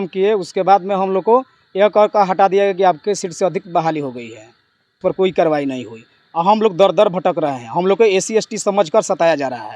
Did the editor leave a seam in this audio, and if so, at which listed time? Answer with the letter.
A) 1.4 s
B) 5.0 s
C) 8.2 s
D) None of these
B